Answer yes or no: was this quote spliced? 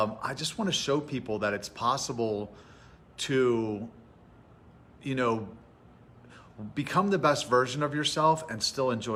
no